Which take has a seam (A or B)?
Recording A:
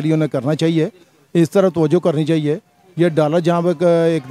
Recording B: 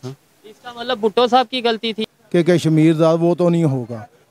B